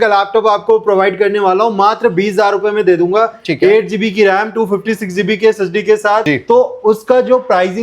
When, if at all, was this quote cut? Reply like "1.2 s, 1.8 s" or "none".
6.2 s